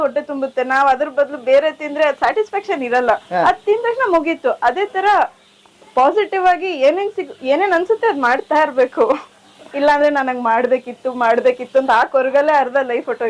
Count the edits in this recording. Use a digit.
1